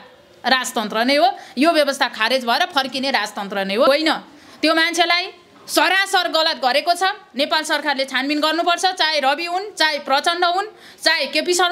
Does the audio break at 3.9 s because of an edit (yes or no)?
yes